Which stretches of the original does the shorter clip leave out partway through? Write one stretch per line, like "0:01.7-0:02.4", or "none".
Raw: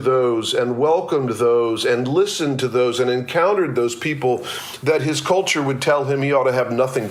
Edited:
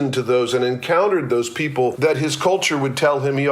0:04.4-0:04.8

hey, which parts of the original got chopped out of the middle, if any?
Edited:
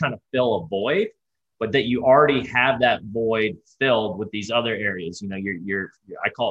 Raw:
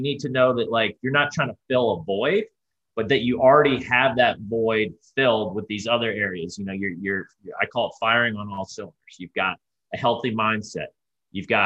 none

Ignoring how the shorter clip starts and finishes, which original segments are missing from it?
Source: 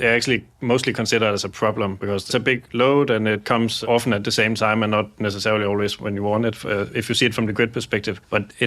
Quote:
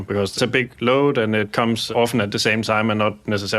none

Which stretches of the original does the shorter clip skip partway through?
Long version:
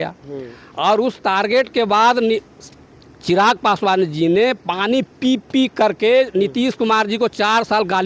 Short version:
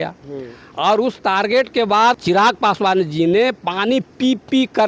0:02.2-0:03.2

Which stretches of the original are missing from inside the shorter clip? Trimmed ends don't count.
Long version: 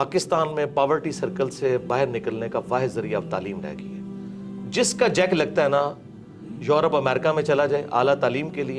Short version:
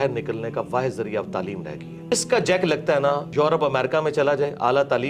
0:04.1-0:04.8
0:05.9-0:06.6

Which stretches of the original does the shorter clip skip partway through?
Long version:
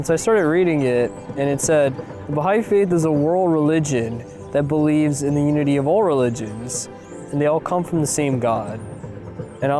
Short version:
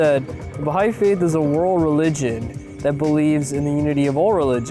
none

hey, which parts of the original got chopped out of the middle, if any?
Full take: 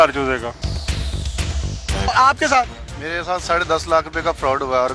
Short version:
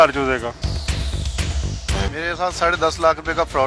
0:01.9-0:02.8

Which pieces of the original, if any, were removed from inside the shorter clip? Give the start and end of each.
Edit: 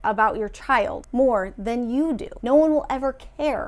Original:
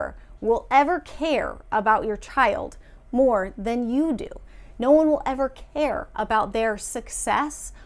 0:02.7-0:03.0
0:04.3-0:04.7

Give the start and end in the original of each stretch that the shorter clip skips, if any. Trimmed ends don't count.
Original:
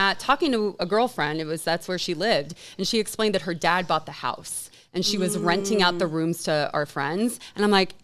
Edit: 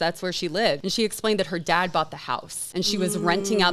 0:02.5-0:02.8
0:04.5-0:04.8

